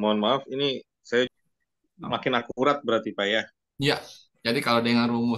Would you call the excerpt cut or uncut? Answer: cut